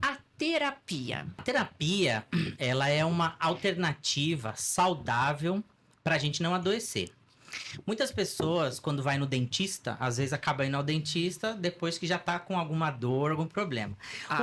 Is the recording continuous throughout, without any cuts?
no; 1 cut; at 1.4 s

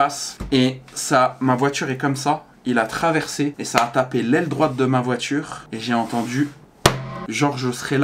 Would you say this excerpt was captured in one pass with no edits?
no; 1 cut; at 7.1 s

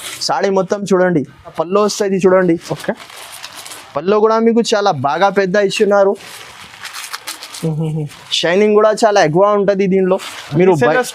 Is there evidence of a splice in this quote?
yes; 1 cut; at 1.6 s

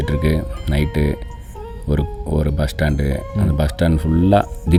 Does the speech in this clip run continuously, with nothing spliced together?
yes; 0 cuts

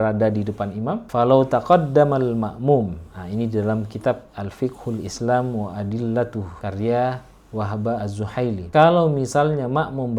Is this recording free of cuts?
no; 1 cut; at 1.0 s

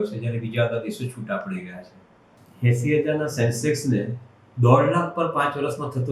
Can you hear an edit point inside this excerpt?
yes; 1 cut; at 2.4 s

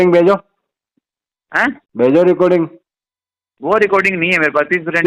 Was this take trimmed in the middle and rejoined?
no; 0 cuts

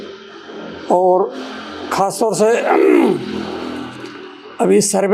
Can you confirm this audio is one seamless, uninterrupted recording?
yes; 0 cuts

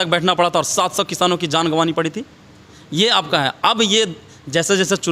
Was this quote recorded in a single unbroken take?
yes; 0 cuts

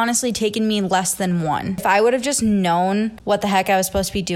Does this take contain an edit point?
yes; 2 cuts; at 1.8 s, 3.2 s

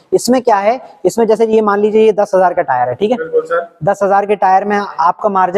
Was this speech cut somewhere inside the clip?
no; 0 cuts

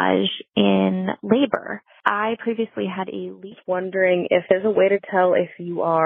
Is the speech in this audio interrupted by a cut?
yes; 2 cuts; at 1.9 s, 3.5 s

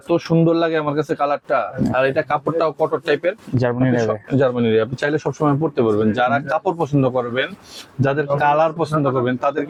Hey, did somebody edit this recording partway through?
no; 0 cuts

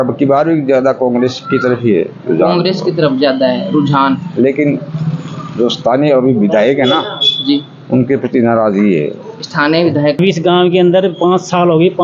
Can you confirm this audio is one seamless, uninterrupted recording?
no; 1 cut; at 10.2 s

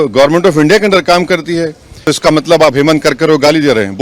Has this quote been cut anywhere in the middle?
yes; 1 cut; at 2.0 s

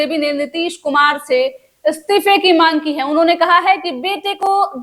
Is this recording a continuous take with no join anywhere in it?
yes; 0 cuts

